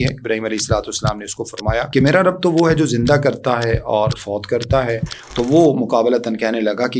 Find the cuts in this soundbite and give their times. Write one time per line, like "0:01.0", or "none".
0:01.9